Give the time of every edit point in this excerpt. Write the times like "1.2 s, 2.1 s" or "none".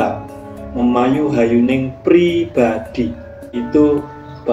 3.6 s